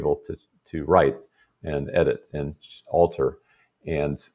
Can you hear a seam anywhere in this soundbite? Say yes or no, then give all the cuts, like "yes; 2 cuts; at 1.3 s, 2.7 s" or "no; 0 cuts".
no; 0 cuts